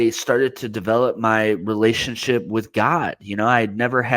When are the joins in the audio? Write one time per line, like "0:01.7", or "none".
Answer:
none